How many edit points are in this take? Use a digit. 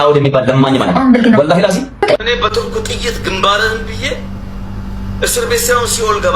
1